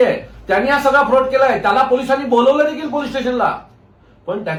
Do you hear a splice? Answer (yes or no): no